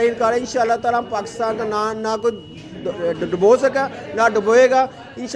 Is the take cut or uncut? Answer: uncut